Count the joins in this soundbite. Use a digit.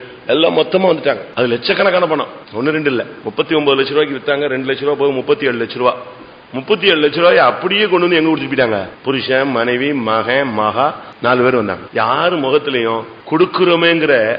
7